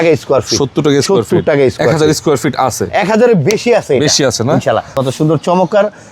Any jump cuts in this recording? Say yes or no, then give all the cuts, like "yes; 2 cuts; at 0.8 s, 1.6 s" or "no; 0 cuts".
yes; 1 cut; at 4.9 s